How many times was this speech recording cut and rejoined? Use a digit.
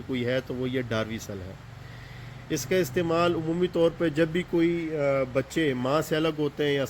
0